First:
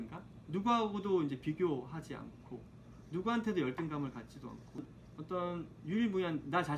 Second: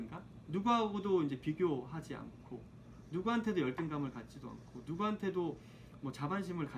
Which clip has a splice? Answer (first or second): first